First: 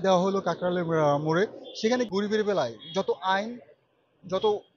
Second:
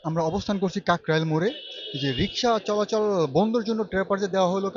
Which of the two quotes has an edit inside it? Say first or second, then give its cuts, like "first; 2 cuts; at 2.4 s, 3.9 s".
first; 1 cut; at 2.1 s